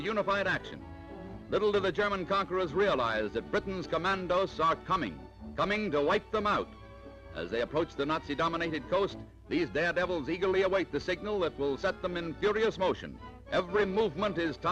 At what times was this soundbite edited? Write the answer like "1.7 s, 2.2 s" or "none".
none